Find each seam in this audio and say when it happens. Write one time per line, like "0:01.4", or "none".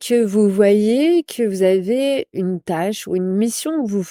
none